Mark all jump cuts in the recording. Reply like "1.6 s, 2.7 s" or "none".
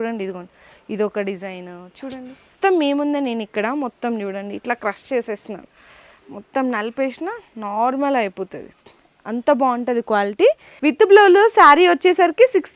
2.5 s, 10.7 s